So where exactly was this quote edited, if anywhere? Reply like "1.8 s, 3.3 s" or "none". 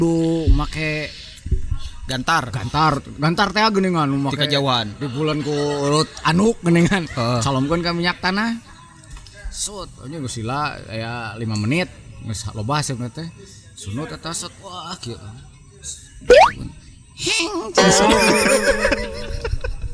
none